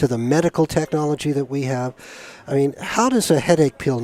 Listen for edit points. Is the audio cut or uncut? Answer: uncut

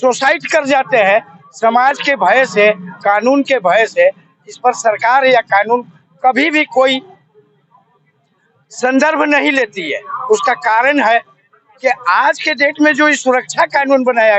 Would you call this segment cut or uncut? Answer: uncut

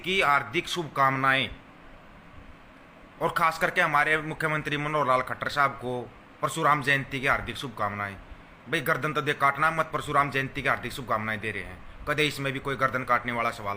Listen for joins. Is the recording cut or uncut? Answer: uncut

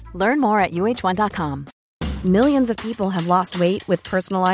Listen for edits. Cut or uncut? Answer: cut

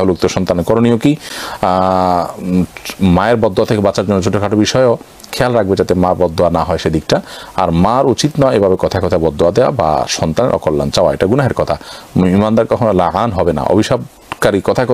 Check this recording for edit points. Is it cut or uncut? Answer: uncut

